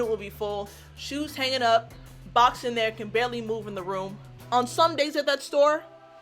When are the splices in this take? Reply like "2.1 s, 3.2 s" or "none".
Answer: 4.3 s